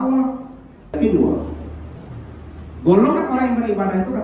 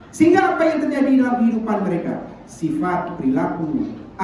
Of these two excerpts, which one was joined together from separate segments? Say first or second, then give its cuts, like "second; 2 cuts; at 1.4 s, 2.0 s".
first; 1 cut; at 0.9 s